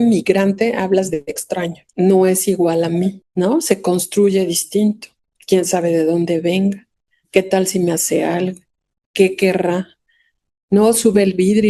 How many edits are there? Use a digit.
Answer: 2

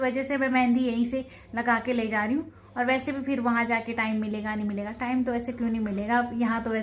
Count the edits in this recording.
0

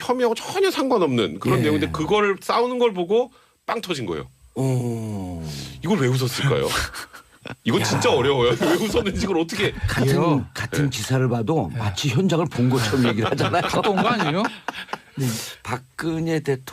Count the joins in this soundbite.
1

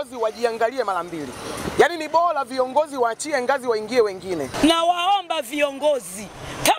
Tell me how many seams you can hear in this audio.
1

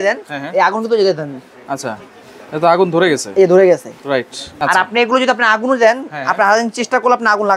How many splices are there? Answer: 1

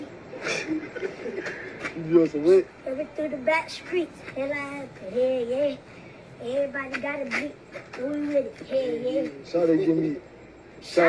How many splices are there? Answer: 1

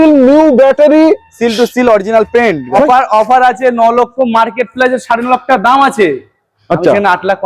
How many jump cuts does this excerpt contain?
1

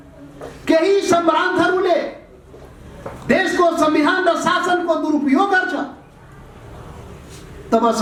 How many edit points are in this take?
0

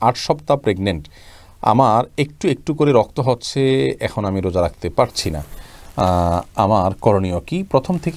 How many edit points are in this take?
0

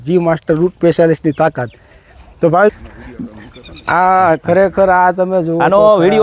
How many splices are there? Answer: 1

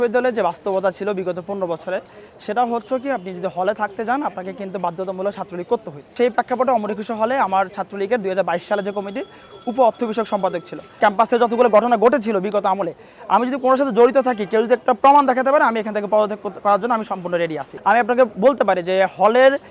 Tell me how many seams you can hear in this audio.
3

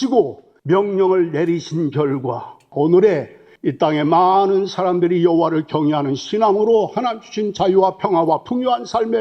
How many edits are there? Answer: 1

